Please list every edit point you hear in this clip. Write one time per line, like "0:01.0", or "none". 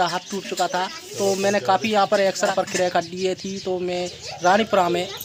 none